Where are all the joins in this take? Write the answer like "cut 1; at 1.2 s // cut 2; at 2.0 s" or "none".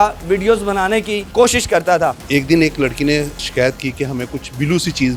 cut 1; at 2.2 s // cut 2; at 3.5 s